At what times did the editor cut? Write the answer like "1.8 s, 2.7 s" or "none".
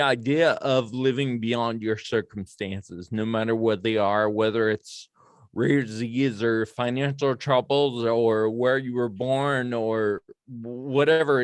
none

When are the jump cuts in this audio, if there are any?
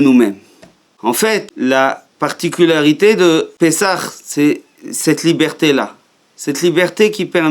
1.0 s, 3.5 s

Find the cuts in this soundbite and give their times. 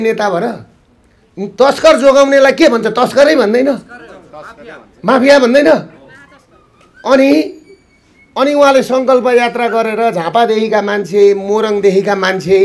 none

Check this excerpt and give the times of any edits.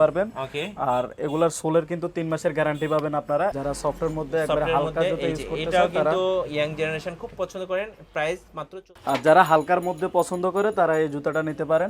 3.5 s, 8.9 s

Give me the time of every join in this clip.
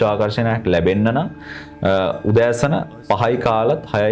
none

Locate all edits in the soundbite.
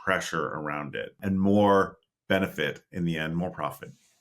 1.2 s

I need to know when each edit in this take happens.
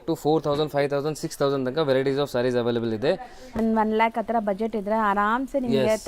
3.6 s

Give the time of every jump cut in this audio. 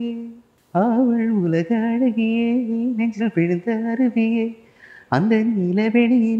none

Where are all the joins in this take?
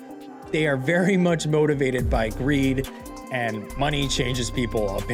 none

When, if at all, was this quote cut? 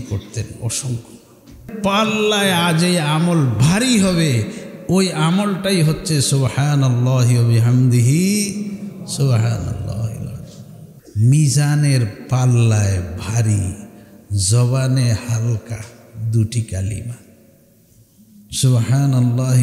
1.7 s, 10.9 s

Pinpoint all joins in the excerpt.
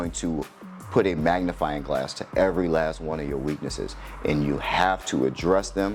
none

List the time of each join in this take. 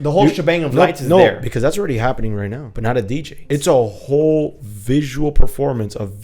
2.9 s

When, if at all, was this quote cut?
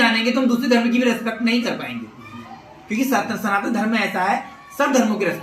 none

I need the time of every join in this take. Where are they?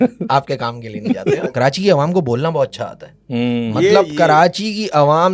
1.5 s

